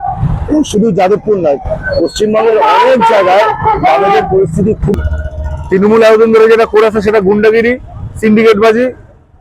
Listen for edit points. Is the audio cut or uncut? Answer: cut